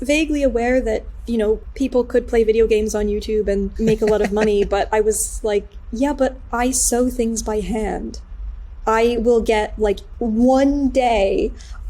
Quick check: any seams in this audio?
yes; 3 cuts; at 1.7 s, 3.7 s, 10.1 s

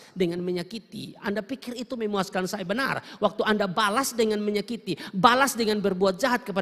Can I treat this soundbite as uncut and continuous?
yes; 0 cuts

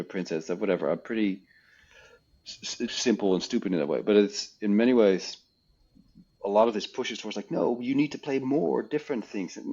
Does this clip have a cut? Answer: yes; 1 cut; at 2.9 s

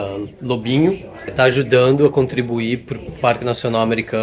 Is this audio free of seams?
no; 1 cut; at 1.2 s

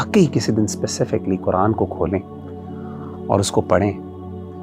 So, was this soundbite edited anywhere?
no; 0 cuts

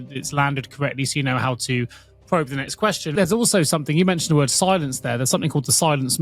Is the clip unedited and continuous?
no; 1 cut; at 3.1 s

